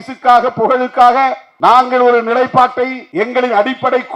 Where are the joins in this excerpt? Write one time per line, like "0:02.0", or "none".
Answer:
0:01.4
0:03.0